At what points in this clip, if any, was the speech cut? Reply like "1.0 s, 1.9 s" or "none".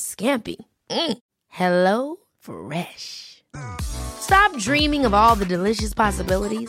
none